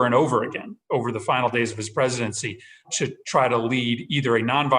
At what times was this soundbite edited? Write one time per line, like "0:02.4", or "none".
0:02.9